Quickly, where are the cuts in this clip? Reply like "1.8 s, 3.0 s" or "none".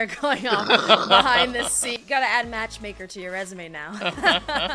1.9 s